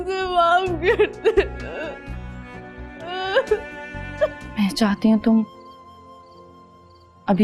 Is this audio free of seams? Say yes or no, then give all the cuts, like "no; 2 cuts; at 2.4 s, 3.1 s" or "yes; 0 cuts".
no; 1 cut; at 4.4 s